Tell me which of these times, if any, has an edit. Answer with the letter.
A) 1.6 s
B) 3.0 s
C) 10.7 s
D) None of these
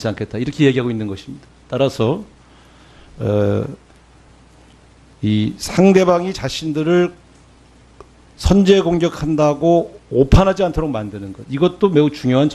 D